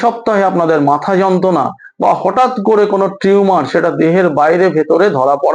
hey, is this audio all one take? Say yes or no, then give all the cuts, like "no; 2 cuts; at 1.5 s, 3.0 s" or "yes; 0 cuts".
yes; 0 cuts